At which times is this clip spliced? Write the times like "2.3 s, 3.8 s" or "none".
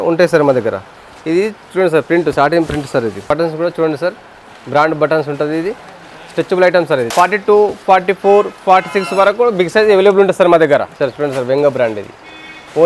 3.2 s, 7.1 s, 11.0 s